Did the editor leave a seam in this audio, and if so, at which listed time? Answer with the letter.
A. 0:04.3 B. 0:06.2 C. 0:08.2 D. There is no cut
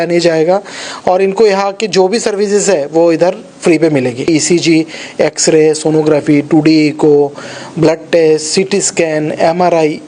A